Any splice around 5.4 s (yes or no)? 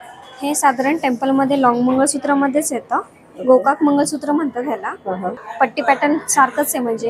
yes